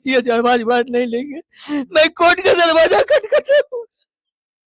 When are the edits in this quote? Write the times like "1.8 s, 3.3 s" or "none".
none